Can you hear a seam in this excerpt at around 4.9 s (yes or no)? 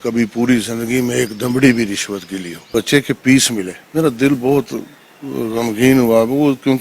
no